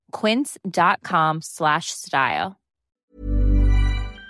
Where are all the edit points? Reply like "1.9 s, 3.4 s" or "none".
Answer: 3.0 s